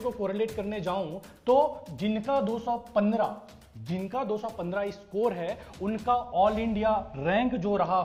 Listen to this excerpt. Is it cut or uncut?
uncut